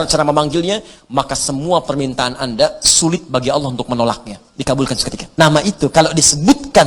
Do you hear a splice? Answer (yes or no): yes